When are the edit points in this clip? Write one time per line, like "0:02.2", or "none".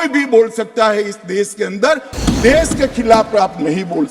0:02.1